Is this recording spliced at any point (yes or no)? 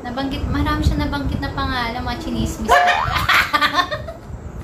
no